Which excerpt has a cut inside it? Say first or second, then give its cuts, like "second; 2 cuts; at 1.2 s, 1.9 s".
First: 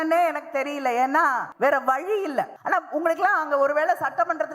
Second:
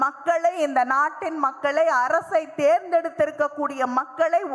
first; 2 cuts; at 1.5 s, 2.6 s